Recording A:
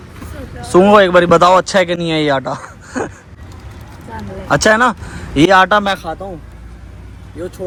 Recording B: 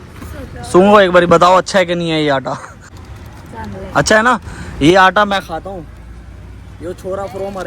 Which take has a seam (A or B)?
B